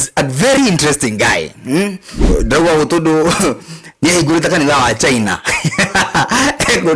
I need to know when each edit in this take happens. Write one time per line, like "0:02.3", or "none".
0:02.3